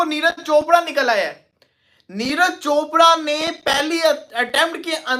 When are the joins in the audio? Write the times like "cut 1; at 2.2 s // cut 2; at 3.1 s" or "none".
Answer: none